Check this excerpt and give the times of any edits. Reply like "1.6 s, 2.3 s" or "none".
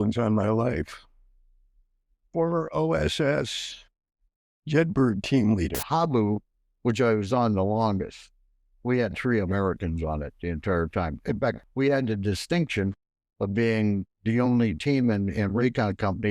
5.8 s, 11.6 s